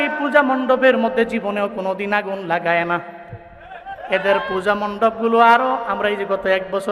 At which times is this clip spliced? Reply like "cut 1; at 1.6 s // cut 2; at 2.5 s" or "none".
none